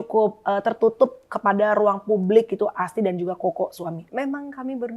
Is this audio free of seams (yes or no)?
no